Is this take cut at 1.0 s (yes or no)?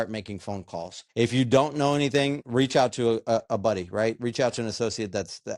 yes